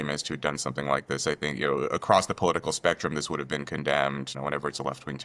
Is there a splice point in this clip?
yes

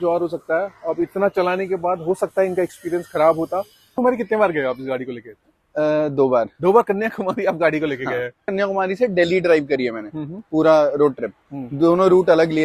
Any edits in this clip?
yes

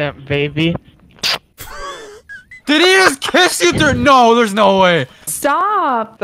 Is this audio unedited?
no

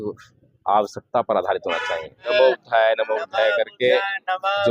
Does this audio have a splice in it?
yes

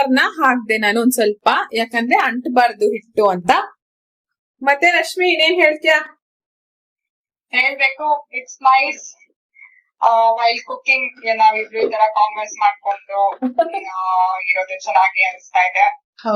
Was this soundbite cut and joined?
no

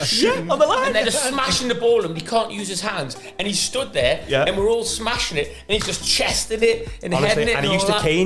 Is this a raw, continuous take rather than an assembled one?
yes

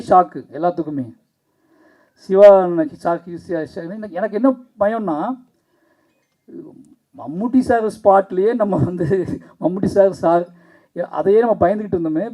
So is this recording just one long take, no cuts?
yes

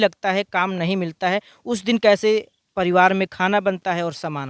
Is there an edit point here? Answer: no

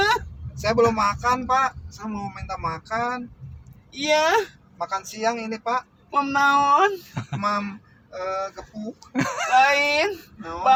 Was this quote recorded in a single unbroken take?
yes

